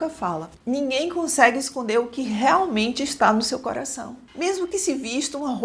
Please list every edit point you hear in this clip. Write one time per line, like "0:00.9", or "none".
none